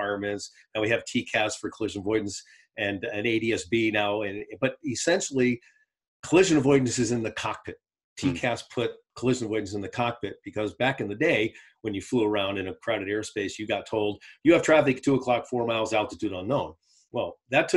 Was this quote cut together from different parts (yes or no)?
no